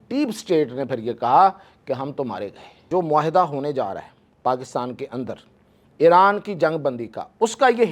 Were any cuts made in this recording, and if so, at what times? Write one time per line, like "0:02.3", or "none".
0:02.8